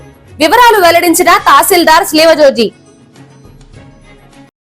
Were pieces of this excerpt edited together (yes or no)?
no